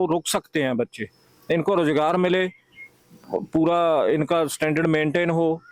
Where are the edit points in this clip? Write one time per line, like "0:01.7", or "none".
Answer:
none

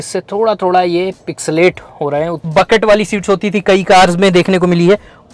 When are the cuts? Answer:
0:02.4

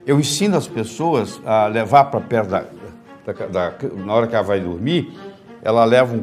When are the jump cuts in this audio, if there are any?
none

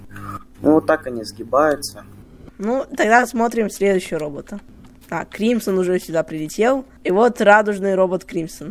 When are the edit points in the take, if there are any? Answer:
0:02.5

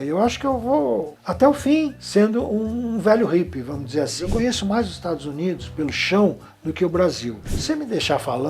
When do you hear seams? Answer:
0:04.2
0:07.5

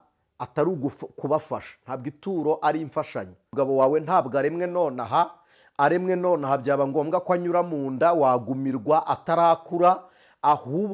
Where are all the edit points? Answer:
0:03.5

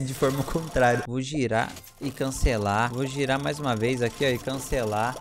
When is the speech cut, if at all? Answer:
0:01.1
0:02.9

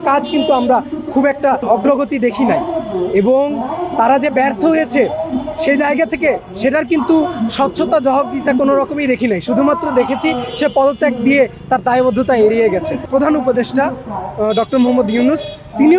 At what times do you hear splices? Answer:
0:13.0

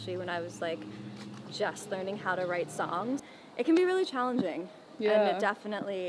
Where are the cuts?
0:03.3

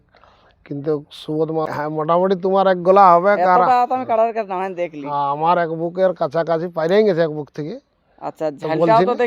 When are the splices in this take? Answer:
0:01.7

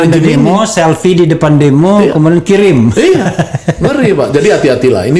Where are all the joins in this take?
none

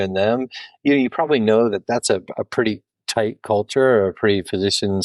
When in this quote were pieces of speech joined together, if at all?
none

